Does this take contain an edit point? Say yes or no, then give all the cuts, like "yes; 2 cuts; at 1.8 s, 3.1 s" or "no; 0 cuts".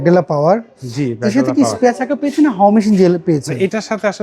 no; 0 cuts